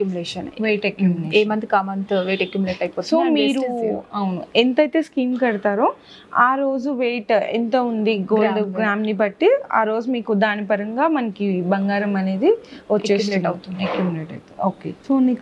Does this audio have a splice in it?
no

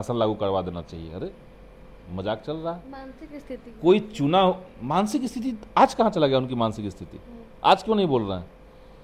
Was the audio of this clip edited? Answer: no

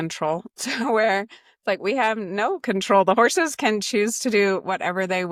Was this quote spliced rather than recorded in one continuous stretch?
no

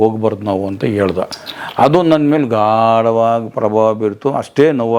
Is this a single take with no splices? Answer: yes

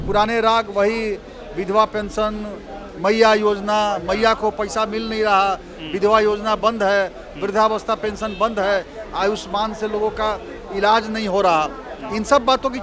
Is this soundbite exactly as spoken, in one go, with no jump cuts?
yes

